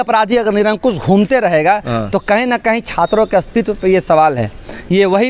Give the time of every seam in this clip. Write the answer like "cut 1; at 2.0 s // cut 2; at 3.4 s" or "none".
none